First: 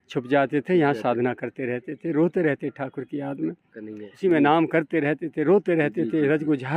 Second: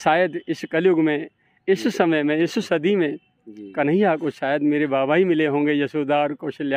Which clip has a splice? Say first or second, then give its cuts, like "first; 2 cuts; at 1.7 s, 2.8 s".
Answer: first; 1 cut; at 4.2 s